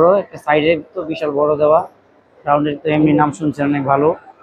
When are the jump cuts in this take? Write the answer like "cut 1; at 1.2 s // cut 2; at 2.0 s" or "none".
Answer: none